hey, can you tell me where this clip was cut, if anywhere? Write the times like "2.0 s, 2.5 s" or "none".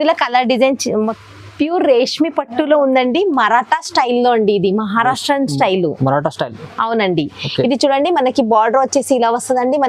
1.1 s